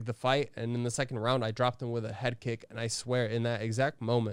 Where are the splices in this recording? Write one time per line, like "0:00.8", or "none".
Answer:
none